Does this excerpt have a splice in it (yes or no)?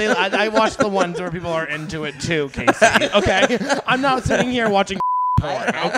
no